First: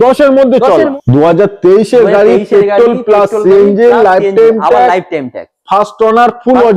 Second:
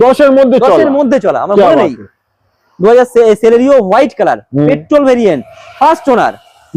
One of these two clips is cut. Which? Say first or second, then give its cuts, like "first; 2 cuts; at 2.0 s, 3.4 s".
first; 1 cut; at 0.9 s